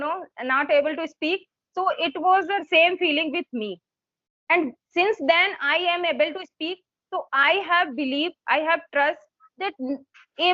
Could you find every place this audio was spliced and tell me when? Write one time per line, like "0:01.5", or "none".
none